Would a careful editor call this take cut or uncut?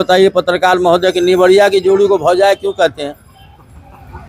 uncut